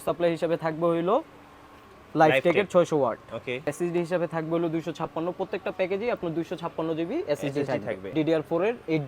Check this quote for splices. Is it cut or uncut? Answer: cut